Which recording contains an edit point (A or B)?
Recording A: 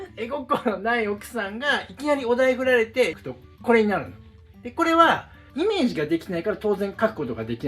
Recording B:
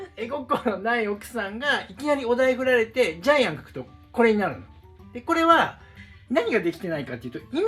A